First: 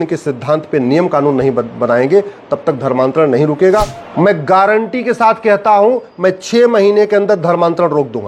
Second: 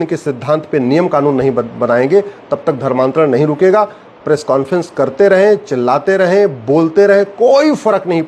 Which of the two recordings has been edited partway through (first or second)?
first